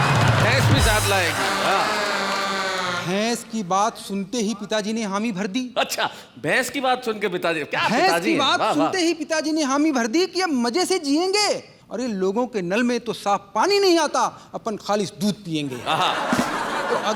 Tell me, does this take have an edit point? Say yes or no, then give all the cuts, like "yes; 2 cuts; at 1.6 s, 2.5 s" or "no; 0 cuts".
no; 0 cuts